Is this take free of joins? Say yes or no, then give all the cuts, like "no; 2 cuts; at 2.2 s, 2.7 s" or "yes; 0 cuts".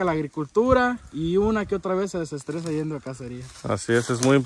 yes; 0 cuts